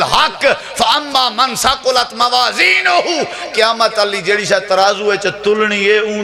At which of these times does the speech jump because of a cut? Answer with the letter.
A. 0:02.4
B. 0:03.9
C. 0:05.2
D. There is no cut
D